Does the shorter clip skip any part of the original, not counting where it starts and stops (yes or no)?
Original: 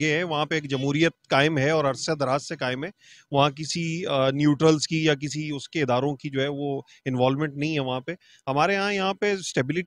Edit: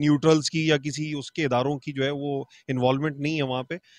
no